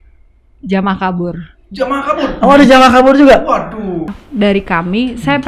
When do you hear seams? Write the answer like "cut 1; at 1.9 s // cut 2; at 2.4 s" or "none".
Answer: cut 1; at 4.1 s